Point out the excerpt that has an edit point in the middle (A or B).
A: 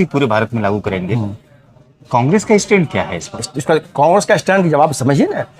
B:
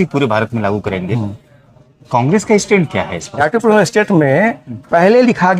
B